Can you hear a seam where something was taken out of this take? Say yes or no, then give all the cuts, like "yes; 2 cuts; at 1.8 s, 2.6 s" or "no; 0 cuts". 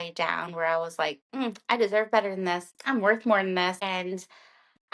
yes; 2 cuts; at 2.7 s, 3.8 s